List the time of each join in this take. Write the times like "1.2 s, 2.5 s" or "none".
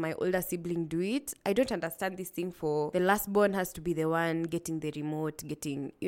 2.9 s